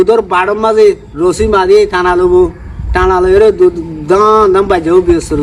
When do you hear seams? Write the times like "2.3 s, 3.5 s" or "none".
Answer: none